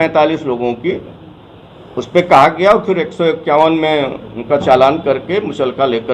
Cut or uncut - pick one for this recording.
uncut